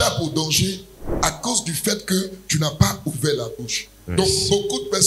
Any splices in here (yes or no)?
no